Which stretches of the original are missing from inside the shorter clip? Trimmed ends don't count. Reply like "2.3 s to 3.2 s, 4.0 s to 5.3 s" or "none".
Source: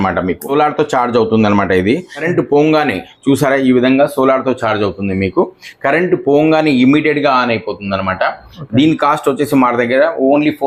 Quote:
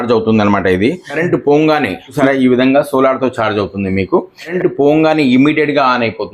3.2 s to 3.4 s, 5.8 s to 6.0 s